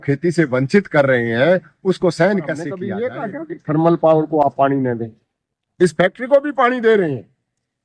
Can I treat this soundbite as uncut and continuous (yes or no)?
no